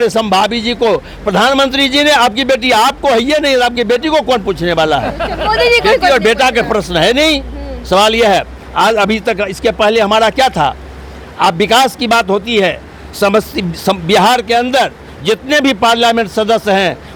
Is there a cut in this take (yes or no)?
no